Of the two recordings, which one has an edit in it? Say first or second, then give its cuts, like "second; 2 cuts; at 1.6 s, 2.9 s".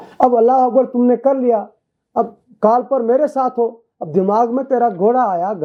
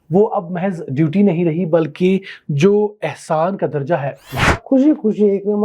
second; 1 cut; at 4.6 s